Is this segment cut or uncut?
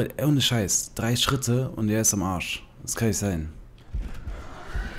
cut